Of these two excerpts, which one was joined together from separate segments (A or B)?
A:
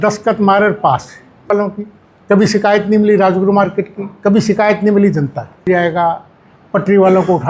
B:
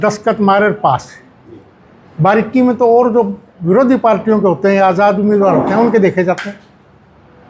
A